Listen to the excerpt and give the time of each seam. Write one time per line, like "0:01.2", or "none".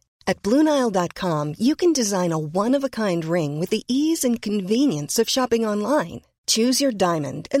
none

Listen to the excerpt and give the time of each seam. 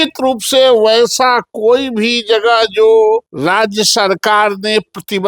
0:03.3

